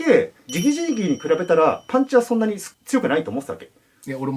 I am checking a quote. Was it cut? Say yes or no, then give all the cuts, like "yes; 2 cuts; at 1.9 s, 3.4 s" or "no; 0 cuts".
no; 0 cuts